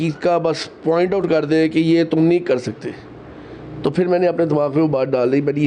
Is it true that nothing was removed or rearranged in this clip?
yes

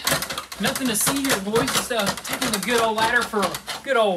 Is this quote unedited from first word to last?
yes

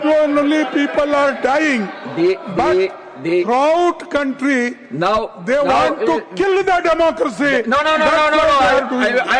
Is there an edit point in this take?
no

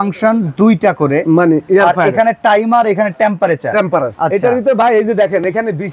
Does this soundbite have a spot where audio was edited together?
yes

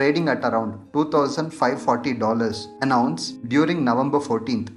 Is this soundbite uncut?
yes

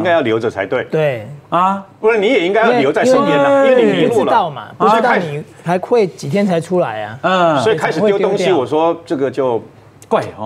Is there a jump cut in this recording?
no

